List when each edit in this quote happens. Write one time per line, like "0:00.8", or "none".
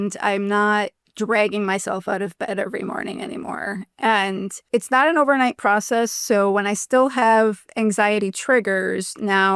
0:01.0
0:04.6